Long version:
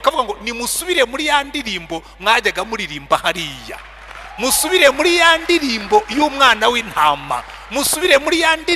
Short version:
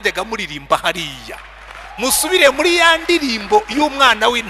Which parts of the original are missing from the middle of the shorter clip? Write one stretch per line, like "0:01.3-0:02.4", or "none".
none

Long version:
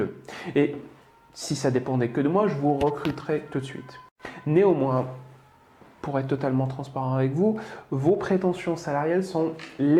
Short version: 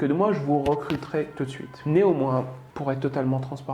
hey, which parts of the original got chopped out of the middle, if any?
0:03.8-0:04.3
0:05.2-0:05.9

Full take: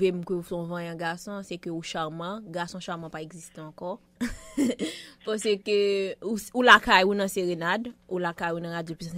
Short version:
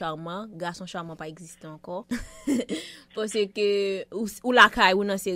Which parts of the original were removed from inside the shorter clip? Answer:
0:04.0-0:04.1

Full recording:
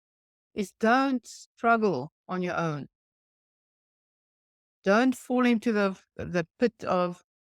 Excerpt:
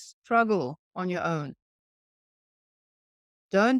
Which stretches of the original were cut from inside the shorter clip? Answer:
none

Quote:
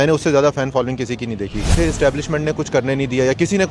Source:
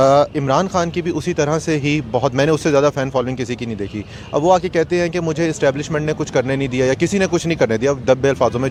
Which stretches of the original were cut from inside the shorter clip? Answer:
0:04.1-0:05.4

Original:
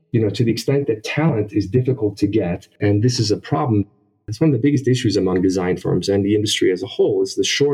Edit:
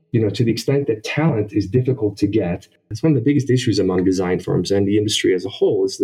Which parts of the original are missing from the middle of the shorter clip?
0:02.7-0:04.0

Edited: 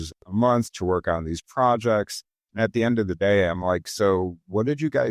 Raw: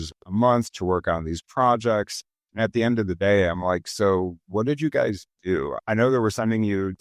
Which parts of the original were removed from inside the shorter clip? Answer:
none

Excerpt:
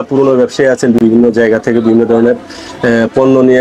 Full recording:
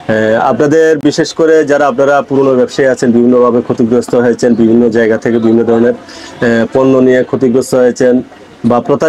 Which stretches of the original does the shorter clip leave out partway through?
0:03.2-0:04.6

